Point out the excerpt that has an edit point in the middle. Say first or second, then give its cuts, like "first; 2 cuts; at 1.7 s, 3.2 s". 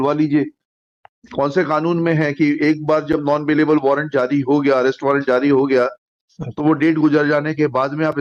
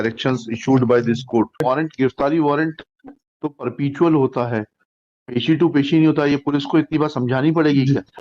second; 1 cut; at 1.5 s